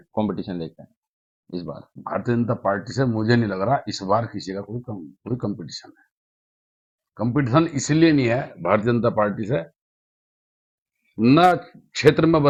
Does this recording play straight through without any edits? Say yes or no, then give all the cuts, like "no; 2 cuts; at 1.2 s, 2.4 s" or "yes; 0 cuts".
yes; 0 cuts